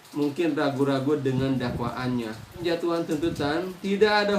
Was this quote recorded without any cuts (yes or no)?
no